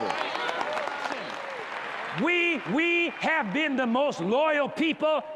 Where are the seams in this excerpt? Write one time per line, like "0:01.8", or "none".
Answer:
0:01.5